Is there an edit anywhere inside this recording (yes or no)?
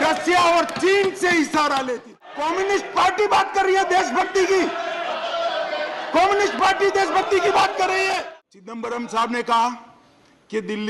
yes